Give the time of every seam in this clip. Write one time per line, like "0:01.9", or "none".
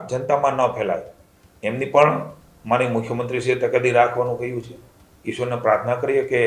none